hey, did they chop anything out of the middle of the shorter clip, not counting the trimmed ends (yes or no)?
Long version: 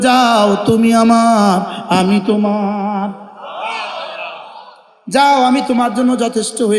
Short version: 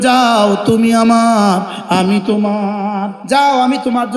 yes